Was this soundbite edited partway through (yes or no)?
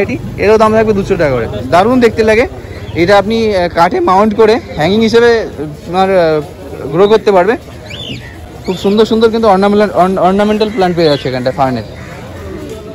no